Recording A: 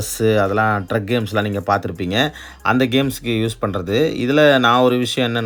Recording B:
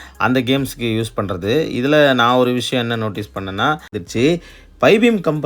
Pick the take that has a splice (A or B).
B